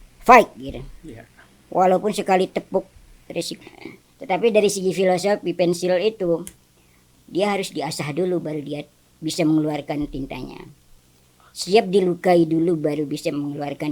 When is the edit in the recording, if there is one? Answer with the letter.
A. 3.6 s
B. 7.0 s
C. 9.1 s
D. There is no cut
A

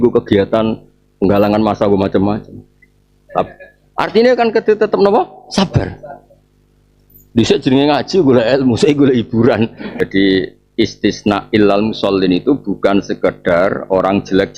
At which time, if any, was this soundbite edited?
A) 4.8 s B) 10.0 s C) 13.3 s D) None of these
B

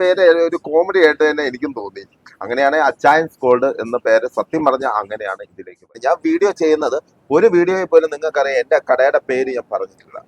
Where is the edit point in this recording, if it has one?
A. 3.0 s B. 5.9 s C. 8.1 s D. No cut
B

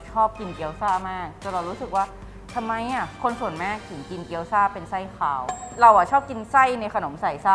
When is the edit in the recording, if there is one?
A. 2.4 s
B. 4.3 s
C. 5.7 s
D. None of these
C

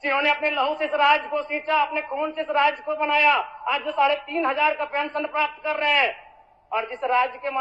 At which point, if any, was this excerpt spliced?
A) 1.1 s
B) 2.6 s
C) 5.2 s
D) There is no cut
D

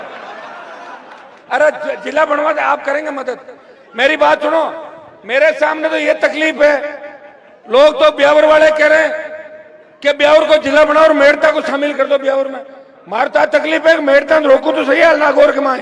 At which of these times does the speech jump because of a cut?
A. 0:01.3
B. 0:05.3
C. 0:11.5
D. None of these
A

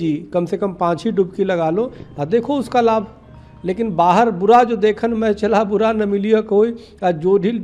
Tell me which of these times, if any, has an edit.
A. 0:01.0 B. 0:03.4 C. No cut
C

